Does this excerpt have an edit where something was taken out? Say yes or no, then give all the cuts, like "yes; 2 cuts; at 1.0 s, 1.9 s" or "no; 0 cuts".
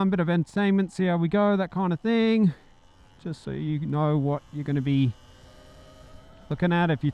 no; 0 cuts